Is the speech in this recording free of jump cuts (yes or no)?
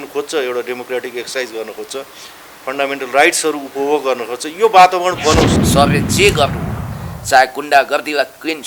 no